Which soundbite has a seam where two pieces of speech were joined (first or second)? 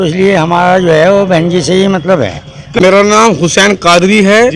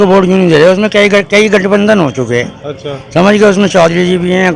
first